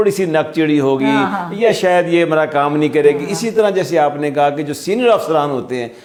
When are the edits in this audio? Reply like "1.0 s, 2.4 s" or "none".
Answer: none